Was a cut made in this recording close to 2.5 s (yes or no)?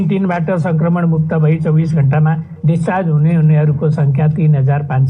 yes